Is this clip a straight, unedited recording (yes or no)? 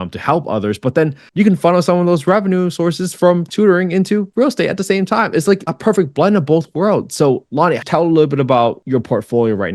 no